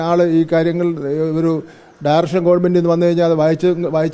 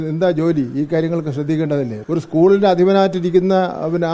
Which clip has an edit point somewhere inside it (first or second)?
second